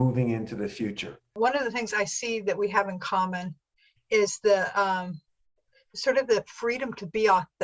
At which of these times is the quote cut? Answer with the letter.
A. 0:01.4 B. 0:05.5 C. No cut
A